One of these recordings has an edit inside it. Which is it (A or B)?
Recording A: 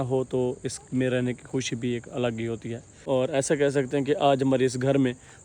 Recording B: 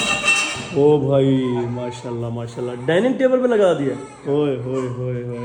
A